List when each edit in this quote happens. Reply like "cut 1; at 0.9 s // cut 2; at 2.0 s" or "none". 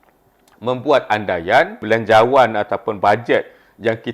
cut 1; at 1.8 s